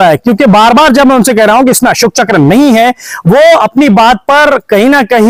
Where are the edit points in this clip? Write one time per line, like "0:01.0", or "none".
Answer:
none